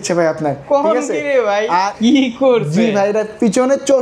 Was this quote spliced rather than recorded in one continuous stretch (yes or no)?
yes